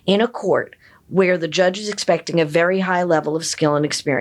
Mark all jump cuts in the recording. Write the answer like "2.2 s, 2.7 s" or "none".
none